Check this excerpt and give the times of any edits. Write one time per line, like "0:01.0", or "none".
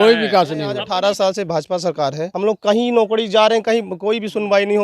0:00.8
0:02.3